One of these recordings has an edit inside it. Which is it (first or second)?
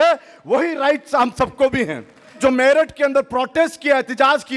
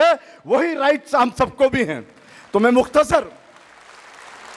first